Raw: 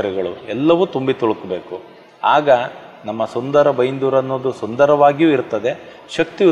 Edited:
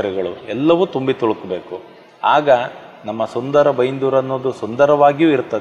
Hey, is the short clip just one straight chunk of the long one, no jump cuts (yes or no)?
yes